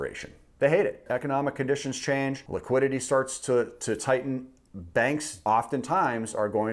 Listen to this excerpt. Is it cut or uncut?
cut